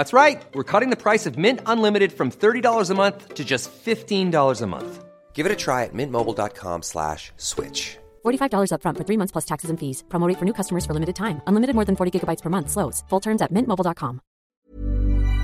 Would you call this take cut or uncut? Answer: cut